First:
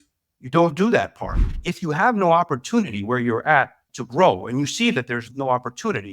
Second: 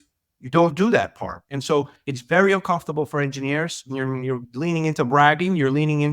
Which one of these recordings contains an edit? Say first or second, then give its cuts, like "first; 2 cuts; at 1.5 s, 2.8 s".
first; 1 cut; at 1.5 s